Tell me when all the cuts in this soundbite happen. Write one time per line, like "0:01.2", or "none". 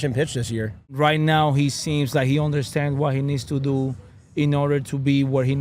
0:00.9